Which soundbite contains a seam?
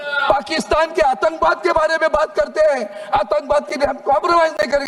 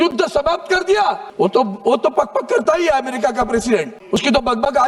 second; 2 cuts; at 1.3 s, 4.0 s

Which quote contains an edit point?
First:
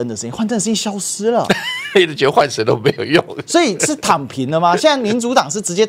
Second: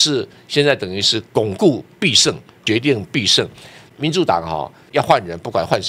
second; 3 cuts; at 2.5 s, 3.8 s, 4.8 s

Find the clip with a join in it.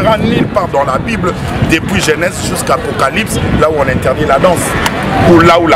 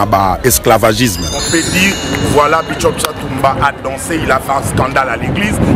second; 1 cut; at 1.4 s

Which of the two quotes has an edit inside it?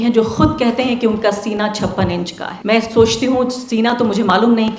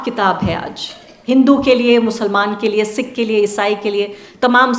first; 1 cut; at 2.5 s

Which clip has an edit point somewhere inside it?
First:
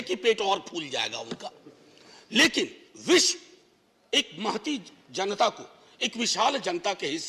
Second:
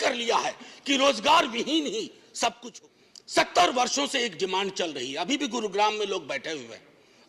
second; 1 cut; at 2.7 s

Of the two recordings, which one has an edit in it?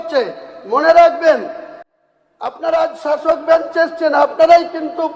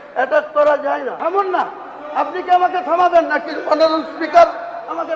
second; 1 cut; at 1.1 s

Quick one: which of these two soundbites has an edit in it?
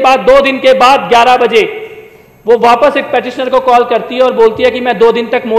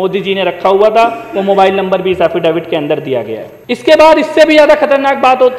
second; 1 cut; at 3.5 s

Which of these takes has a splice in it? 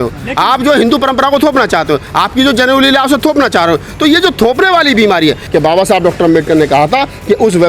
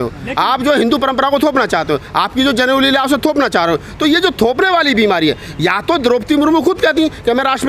first; 1 cut; at 5.4 s

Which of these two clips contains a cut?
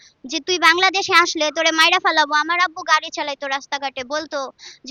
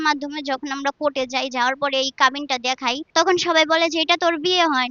second; 1 cut; at 3.0 s

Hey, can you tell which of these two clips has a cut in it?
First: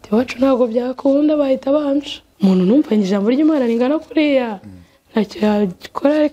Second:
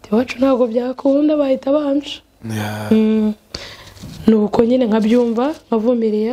first; 1 cut; at 2.2 s

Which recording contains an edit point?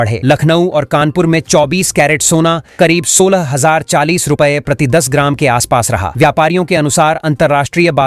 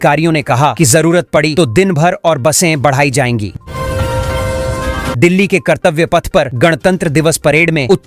second; 2 cuts; at 3.7 s, 5.1 s

